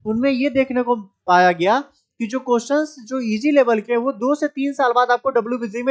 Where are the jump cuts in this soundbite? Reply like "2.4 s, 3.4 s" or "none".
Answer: none